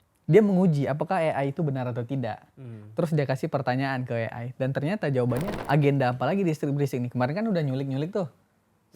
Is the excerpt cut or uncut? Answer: cut